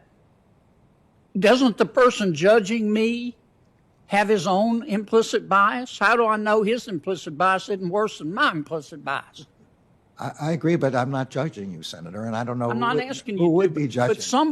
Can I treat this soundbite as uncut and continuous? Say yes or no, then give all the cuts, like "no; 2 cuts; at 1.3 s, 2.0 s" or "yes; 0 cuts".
yes; 0 cuts